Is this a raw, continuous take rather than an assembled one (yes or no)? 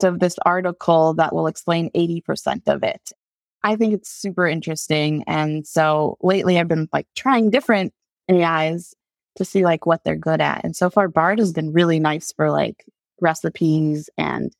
no